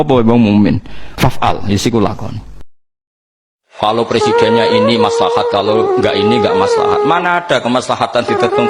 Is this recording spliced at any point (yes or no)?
yes